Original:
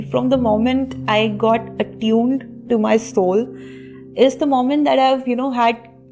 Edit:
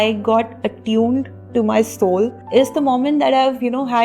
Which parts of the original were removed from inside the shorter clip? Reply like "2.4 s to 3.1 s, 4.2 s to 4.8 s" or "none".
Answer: 3.5 s to 4.0 s